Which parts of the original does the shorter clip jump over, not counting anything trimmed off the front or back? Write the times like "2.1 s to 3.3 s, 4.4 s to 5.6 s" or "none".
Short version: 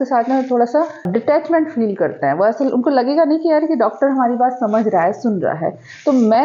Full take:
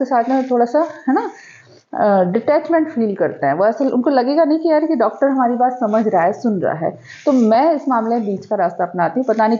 1.1 s to 2.3 s